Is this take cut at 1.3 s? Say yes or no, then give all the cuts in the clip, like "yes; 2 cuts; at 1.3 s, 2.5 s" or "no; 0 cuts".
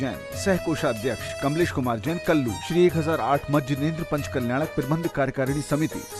no; 0 cuts